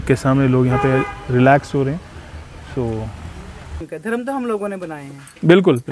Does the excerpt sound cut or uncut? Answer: cut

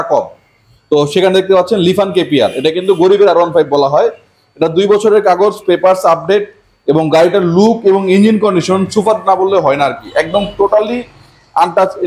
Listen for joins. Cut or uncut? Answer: uncut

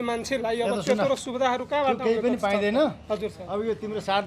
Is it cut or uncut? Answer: uncut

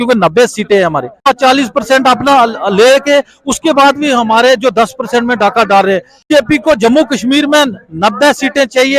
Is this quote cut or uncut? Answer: cut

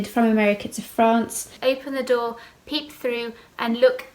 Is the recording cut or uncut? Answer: cut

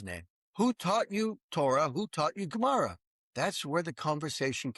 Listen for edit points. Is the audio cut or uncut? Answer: uncut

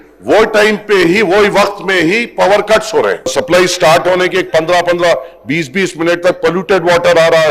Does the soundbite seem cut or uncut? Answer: cut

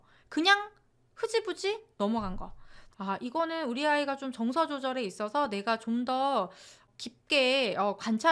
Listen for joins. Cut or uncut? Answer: cut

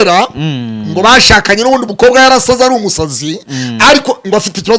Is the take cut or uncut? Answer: uncut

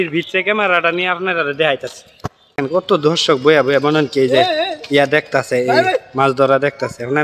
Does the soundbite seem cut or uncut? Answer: cut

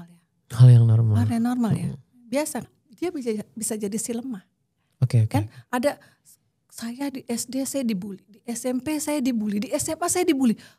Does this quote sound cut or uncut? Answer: cut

